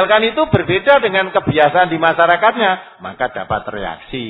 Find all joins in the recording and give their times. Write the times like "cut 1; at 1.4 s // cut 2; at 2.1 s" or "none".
none